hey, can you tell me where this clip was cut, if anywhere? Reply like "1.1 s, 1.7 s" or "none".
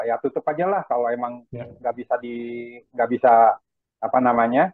none